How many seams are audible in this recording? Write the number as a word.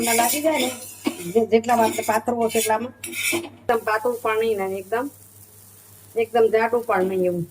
one